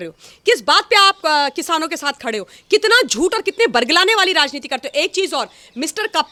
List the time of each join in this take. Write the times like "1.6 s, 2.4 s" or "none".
none

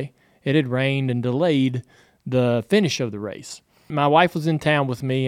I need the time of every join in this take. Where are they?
3.9 s

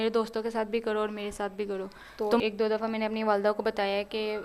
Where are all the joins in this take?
2.4 s

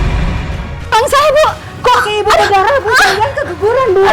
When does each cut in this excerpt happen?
0.9 s

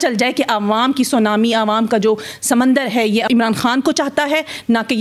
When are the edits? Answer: none

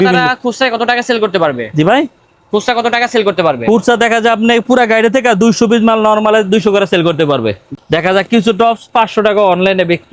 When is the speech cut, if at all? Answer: 7.8 s

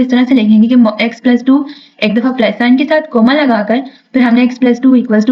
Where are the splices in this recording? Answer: none

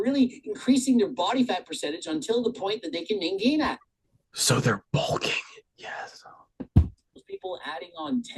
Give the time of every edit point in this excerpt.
7.2 s

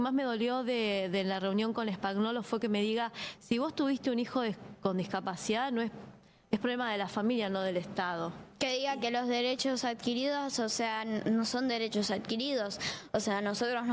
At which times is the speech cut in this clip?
none

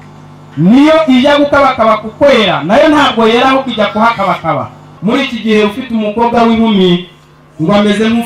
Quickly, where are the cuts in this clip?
4.9 s

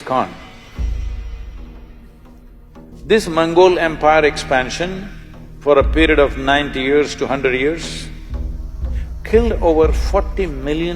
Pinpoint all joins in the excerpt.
2.9 s

